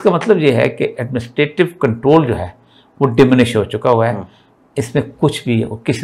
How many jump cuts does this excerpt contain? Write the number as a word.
zero